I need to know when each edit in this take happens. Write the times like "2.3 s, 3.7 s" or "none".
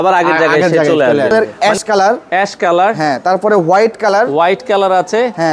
1.3 s